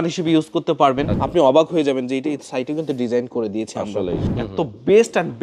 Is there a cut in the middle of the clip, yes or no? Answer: yes